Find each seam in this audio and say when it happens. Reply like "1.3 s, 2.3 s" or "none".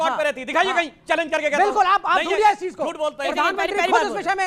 none